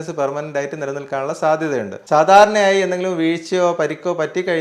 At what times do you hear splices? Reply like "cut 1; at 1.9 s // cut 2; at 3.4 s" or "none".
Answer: cut 1; at 2.0 s